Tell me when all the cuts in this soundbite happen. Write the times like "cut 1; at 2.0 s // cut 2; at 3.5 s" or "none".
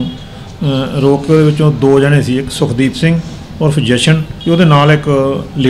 cut 1; at 4.3 s